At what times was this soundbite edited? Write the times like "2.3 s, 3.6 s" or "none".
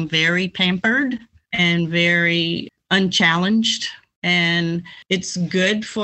1.4 s, 2.7 s, 4.1 s, 4.9 s